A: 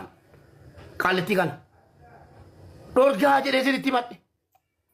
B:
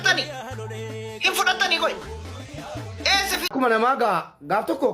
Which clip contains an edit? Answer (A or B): B